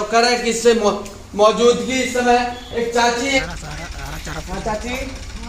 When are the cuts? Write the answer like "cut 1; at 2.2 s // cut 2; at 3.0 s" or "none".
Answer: cut 1; at 3.4 s